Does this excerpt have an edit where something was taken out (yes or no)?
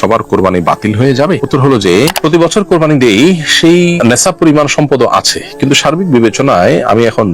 yes